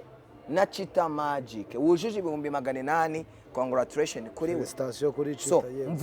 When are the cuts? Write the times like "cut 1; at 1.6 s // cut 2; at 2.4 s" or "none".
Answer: none